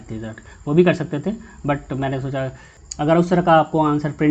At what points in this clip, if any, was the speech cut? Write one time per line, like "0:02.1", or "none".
0:02.7